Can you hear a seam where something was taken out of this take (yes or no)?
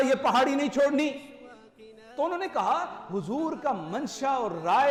no